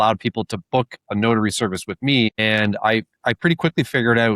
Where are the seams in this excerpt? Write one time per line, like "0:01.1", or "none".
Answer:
0:02.4